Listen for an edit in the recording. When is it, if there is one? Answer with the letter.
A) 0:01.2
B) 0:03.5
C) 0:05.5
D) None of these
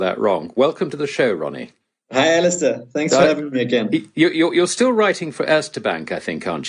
B